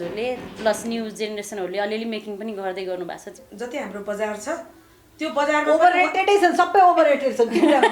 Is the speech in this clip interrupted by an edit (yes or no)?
yes